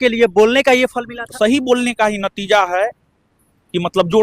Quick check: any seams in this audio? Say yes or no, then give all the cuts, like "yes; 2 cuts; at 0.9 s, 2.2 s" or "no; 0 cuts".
yes; 1 cut; at 1.3 s